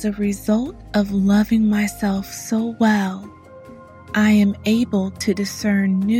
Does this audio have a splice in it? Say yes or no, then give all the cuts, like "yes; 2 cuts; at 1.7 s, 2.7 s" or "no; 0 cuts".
no; 0 cuts